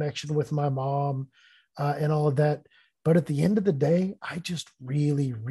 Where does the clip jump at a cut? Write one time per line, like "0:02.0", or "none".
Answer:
none